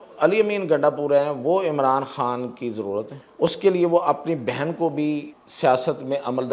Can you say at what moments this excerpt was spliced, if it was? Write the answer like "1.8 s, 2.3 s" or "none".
3.2 s, 5.4 s

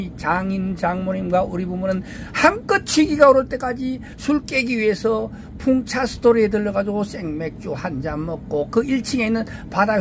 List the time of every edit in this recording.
4.1 s

